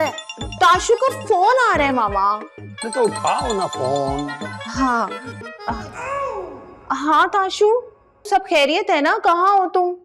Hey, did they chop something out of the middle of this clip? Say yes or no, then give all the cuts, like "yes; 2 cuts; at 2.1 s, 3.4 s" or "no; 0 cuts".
no; 0 cuts